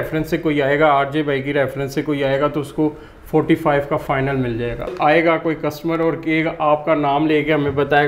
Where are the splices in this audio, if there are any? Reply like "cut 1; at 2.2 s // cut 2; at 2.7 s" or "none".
cut 1; at 4.9 s